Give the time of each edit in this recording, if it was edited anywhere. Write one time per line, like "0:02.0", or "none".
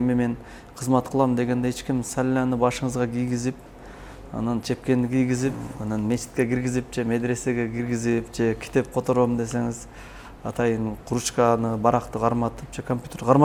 none